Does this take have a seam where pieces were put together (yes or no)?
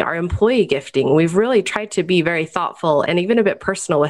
no